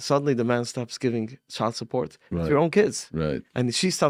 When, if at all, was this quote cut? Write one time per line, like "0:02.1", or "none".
none